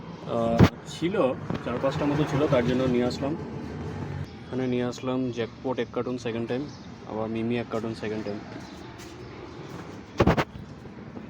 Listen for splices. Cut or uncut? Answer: cut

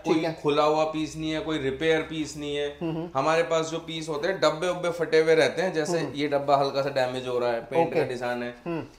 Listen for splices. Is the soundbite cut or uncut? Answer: uncut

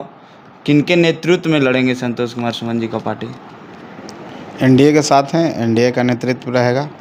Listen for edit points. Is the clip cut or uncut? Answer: uncut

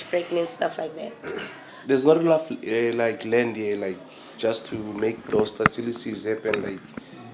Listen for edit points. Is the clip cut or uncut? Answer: cut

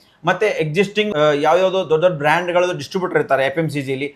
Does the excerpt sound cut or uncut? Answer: cut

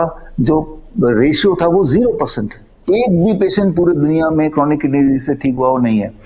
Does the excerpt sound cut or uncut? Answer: uncut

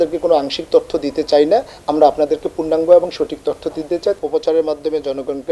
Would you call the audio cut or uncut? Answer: cut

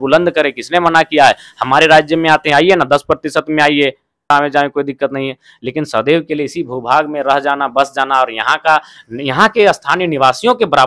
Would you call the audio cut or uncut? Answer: cut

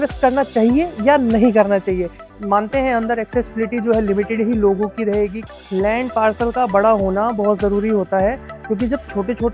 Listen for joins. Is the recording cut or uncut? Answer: cut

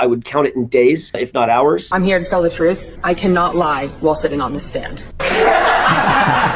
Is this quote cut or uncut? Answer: cut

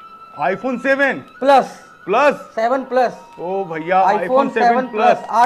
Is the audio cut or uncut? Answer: uncut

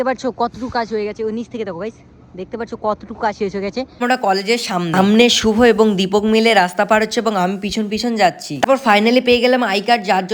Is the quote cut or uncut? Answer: cut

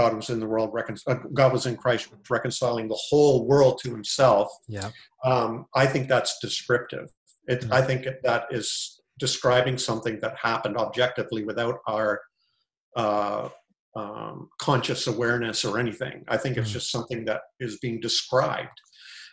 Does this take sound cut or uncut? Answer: uncut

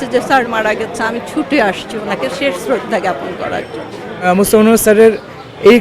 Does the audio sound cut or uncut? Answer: cut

